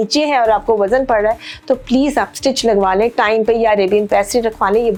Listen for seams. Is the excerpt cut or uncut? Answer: uncut